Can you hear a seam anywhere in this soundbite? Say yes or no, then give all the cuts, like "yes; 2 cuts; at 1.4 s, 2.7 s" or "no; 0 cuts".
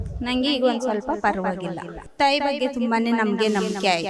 no; 0 cuts